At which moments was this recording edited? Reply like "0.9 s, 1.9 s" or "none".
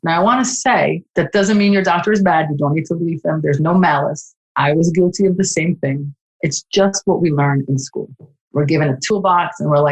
9.0 s